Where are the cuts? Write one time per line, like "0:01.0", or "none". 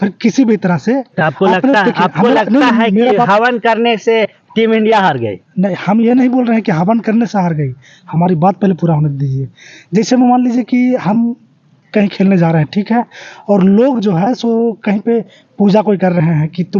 none